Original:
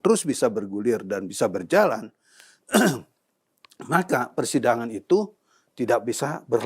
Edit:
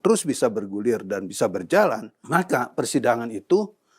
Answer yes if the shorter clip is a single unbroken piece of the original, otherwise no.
no